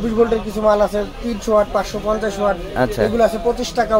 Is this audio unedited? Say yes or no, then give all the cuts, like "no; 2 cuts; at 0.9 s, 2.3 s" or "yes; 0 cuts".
yes; 0 cuts